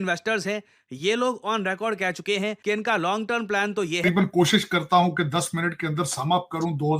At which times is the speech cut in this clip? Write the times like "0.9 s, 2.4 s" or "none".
4.0 s